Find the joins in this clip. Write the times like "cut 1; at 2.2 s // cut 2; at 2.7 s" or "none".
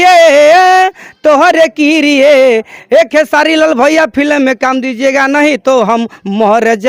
none